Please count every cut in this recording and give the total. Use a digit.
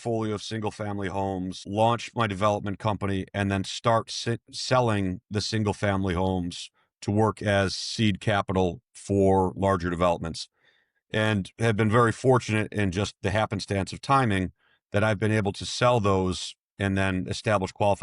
1